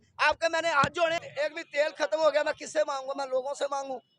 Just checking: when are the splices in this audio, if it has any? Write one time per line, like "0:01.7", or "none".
0:01.3